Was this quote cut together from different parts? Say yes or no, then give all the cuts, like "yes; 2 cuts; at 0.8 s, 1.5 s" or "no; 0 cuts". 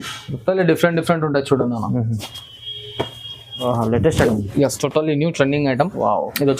yes; 1 cut; at 3.6 s